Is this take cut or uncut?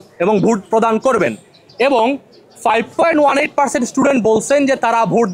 uncut